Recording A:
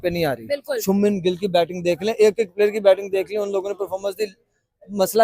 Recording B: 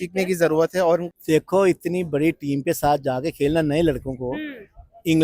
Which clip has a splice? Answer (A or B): B